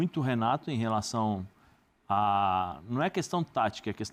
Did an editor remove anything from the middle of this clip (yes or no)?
no